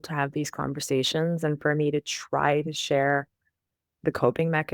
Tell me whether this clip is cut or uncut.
uncut